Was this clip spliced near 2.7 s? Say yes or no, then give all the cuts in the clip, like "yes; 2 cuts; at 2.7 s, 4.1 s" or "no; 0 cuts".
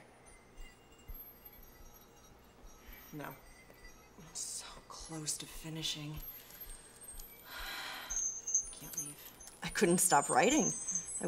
yes; 1 cut; at 2.7 s